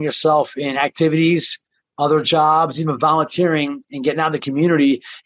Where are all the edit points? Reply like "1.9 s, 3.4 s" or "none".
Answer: none